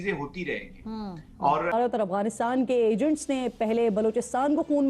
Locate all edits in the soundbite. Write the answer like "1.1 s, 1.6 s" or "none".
1.7 s